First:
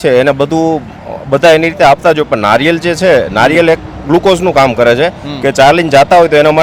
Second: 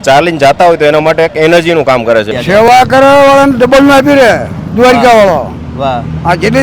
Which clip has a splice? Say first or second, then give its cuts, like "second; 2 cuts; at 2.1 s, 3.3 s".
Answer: second; 1 cut; at 2.3 s